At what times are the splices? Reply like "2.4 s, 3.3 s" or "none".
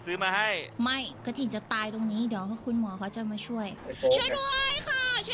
3.8 s